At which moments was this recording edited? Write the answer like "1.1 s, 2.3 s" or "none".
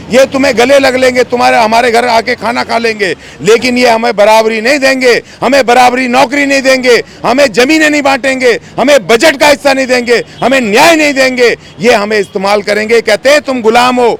none

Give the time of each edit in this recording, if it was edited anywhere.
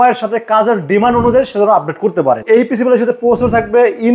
2.4 s

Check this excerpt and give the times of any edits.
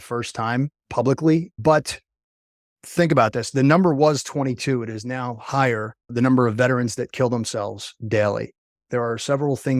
1.5 s, 2.7 s, 8.7 s

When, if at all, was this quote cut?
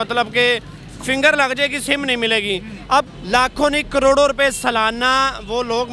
3.1 s

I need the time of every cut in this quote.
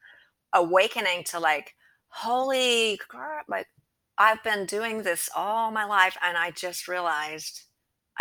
none

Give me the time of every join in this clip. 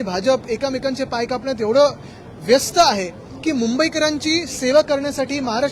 none

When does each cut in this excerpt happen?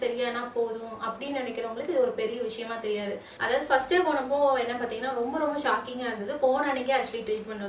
3.3 s

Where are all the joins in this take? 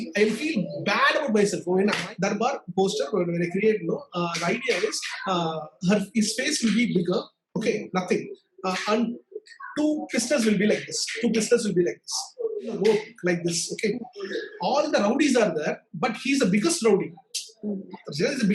2.0 s, 12.7 s

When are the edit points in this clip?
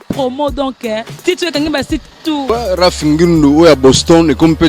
2.4 s

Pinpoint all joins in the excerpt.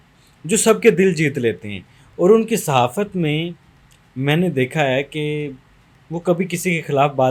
none

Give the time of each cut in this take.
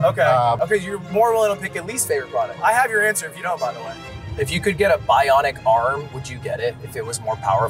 2.5 s, 3.9 s

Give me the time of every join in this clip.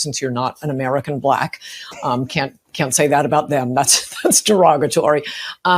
3.8 s

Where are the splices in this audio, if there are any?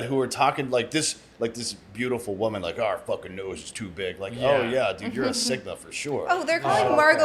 none

